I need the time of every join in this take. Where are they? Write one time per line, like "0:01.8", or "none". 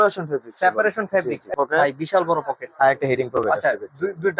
0:01.5